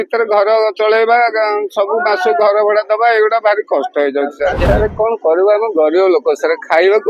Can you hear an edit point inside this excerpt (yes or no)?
yes